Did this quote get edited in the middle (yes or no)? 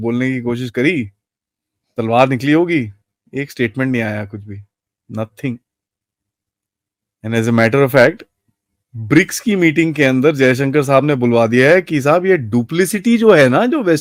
no